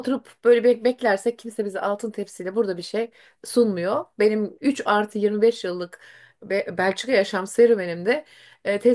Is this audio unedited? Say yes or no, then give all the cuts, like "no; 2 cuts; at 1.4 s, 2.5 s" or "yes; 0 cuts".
yes; 0 cuts